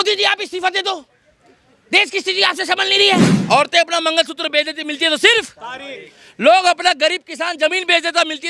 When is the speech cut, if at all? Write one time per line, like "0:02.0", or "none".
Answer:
0:03.3